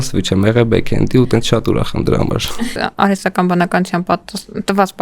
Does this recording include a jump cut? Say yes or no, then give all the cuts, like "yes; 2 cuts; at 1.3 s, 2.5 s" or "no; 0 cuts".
yes; 1 cut; at 2.5 s